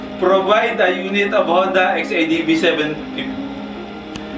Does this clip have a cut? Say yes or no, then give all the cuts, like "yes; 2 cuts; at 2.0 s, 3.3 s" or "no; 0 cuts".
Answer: no; 0 cuts